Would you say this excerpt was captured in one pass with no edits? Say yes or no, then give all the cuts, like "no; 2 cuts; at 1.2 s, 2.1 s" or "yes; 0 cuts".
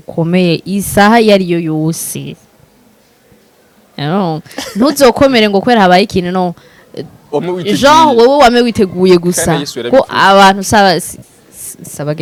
yes; 0 cuts